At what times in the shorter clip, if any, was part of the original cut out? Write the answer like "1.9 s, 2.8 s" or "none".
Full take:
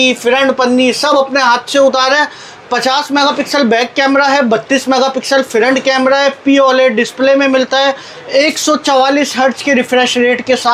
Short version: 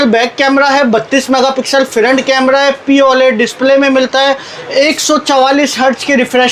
none